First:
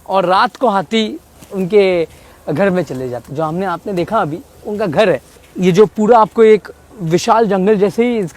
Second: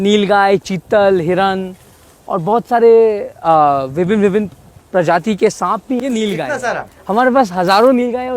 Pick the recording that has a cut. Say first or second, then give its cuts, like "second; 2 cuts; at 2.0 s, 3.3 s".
second; 1 cut; at 6.0 s